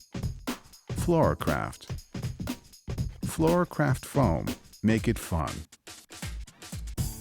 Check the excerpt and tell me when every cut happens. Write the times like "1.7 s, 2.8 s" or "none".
1.0 s